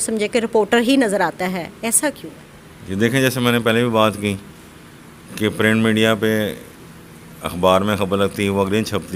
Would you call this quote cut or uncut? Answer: uncut